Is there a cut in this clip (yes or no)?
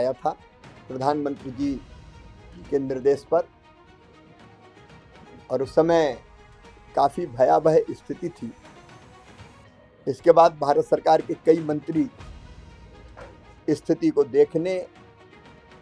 no